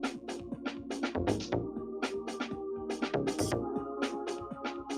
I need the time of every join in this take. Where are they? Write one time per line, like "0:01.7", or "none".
0:01.9